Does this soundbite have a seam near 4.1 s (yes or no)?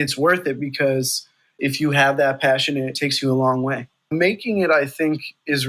yes